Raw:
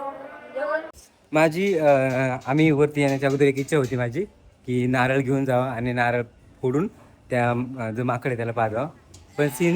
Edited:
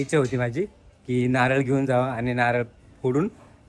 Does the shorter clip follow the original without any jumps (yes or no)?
yes